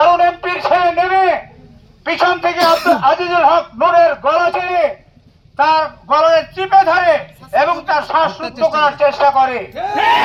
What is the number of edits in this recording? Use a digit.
0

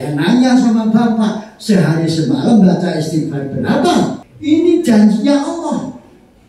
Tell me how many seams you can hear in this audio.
1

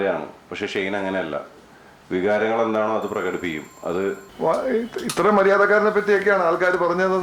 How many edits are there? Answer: 1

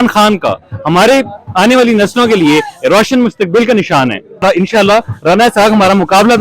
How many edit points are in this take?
1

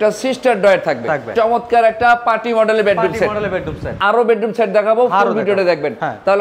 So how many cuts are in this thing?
2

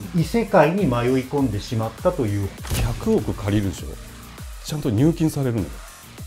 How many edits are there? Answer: 1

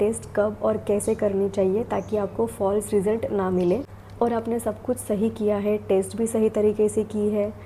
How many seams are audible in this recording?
0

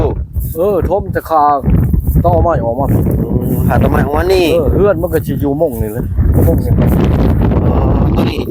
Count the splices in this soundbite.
0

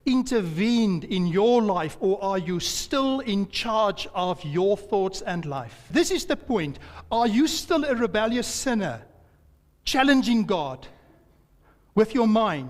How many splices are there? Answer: 1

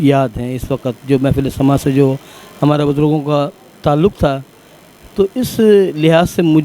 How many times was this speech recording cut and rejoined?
0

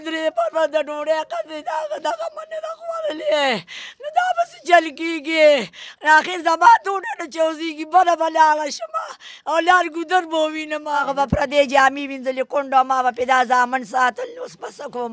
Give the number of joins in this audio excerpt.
1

